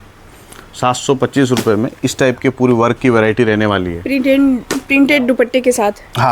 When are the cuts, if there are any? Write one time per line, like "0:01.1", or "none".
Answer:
none